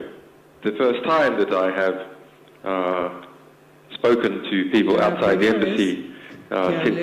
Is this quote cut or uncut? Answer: uncut